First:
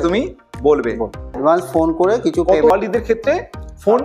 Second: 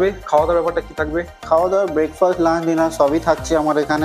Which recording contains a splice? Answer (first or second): first